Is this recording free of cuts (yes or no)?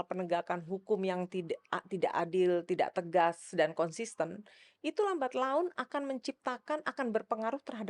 yes